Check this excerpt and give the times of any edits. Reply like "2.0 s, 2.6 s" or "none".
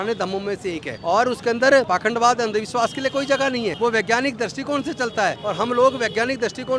0.9 s, 1.9 s, 3.8 s, 5.4 s